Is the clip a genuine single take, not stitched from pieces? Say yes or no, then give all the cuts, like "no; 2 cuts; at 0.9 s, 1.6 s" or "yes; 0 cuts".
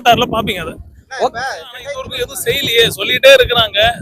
no; 1 cut; at 2.1 s